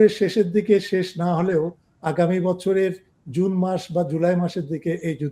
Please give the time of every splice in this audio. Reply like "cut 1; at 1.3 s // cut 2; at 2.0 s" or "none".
none